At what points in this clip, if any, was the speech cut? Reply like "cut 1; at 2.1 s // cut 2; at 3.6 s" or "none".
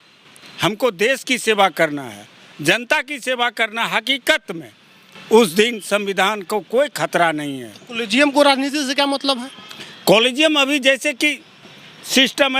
none